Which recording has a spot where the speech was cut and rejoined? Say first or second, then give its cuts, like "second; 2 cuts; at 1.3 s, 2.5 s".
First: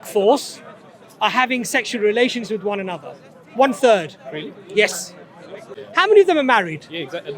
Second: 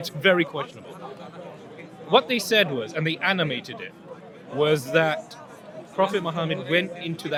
first; 1 cut; at 5.8 s